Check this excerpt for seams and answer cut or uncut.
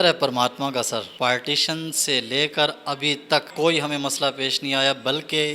cut